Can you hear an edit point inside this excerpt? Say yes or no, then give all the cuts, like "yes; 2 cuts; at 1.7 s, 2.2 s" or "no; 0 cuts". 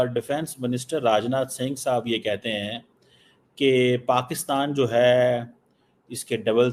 no; 0 cuts